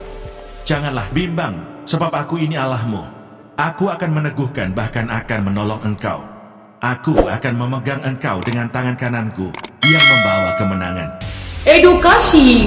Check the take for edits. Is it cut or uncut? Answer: uncut